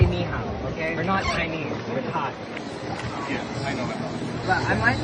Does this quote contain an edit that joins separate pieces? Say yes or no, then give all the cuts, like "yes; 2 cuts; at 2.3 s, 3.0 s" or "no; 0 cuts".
yes; 2 cuts; at 1.0 s, 2.6 s